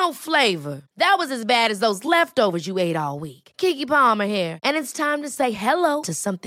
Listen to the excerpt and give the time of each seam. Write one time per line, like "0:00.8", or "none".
none